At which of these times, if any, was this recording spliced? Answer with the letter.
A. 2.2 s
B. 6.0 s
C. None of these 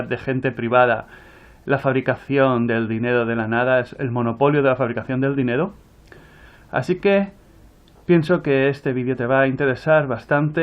B